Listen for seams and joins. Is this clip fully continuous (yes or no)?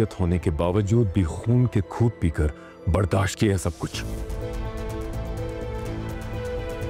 no